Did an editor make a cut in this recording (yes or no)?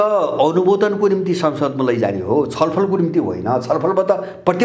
no